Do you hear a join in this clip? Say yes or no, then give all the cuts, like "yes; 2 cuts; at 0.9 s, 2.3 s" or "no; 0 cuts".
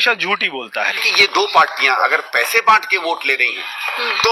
yes; 1 cut; at 1.0 s